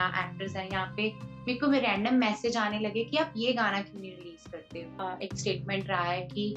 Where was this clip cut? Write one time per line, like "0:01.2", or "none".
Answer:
0:04.9